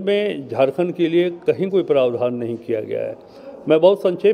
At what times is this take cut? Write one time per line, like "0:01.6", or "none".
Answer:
none